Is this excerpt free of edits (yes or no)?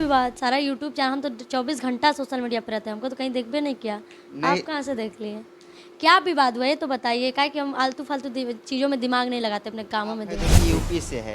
no